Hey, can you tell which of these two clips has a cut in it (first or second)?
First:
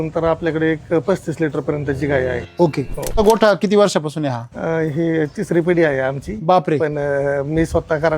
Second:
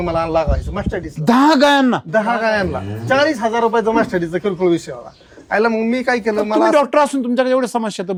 first